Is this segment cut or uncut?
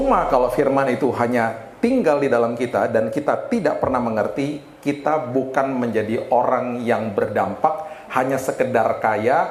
uncut